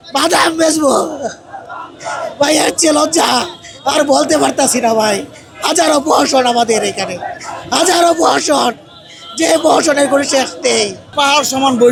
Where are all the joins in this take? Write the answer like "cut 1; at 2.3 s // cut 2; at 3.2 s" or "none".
none